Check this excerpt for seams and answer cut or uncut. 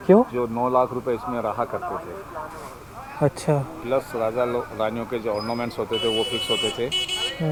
uncut